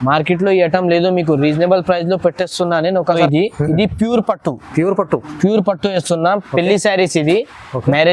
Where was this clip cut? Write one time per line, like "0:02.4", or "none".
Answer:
0:03.2